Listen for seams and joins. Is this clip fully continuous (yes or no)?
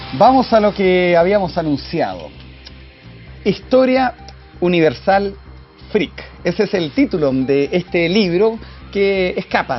yes